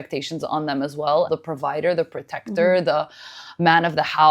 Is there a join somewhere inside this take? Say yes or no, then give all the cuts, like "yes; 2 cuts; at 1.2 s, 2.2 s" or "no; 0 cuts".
yes; 1 cut; at 1.3 s